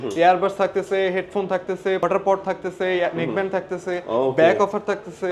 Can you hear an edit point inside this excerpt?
yes; 1 cut; at 2.0 s

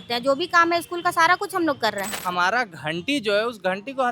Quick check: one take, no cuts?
no; 1 cut; at 2.2 s

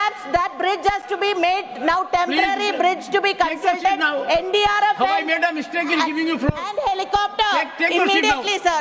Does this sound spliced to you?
no; 0 cuts

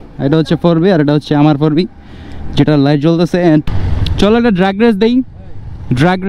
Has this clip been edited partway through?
yes; 1 cut; at 3.7 s

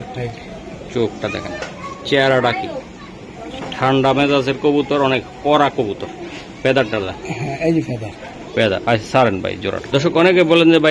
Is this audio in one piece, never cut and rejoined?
yes; 0 cuts

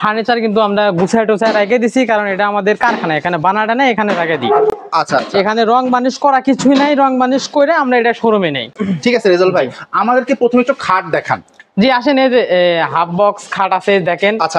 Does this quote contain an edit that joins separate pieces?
no; 0 cuts

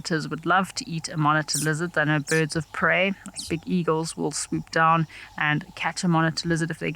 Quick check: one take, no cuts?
yes; 0 cuts

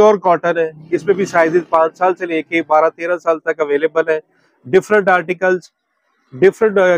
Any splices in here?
no; 0 cuts

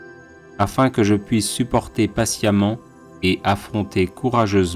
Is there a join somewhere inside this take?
yes; 1 cut; at 0.9 s

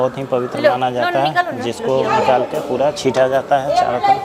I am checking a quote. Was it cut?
no; 0 cuts

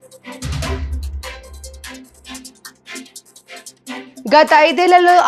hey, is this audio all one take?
no; 2 cuts; at 0.7 s, 4.2 s

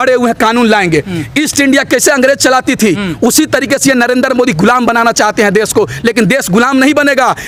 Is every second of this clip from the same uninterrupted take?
yes; 0 cuts

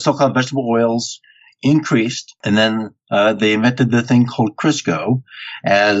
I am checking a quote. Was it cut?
yes; 1 cut; at 2.3 s

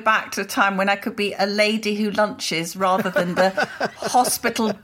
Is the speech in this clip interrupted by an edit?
no; 0 cuts

